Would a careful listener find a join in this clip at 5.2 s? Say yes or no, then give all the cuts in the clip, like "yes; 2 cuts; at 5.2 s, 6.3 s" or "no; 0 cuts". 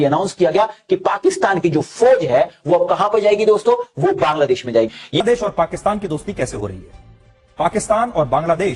yes; 1 cut; at 5.2 s